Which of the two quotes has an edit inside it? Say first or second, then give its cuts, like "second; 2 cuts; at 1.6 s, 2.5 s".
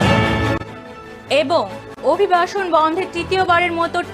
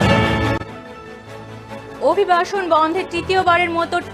first; 2 cuts; at 1.2 s, 1.8 s